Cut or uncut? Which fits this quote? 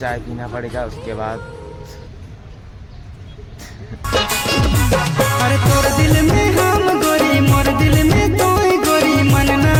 uncut